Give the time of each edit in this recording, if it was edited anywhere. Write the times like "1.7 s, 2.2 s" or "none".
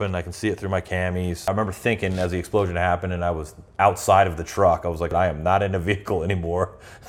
1.5 s, 5.0 s